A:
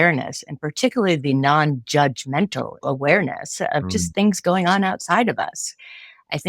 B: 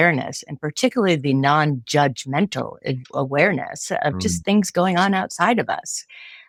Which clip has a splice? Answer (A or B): A